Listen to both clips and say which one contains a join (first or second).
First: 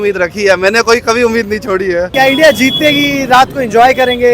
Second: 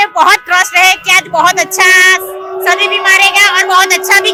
first